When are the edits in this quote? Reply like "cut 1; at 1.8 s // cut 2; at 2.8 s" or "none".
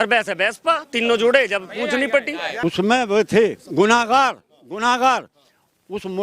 cut 1; at 2.4 s